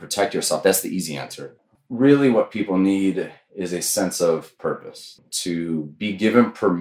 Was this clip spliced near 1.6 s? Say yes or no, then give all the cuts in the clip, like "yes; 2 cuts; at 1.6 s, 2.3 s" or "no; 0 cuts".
yes; 2 cuts; at 1.6 s, 5.3 s